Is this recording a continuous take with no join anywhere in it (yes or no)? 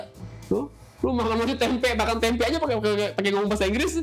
yes